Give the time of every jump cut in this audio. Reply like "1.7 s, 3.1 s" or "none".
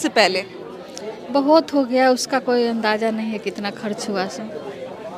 none